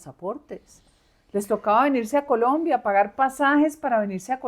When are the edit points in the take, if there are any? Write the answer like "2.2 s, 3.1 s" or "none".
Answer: none